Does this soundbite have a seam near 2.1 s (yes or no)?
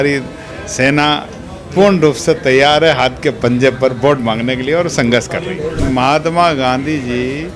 no